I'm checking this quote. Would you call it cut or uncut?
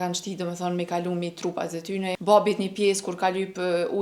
cut